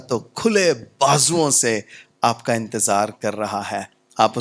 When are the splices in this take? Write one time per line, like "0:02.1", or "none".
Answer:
none